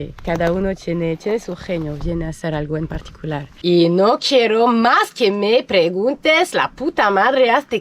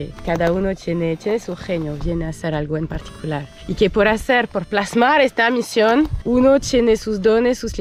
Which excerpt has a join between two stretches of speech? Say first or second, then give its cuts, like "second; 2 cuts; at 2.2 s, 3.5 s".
first; 1 cut; at 3.5 s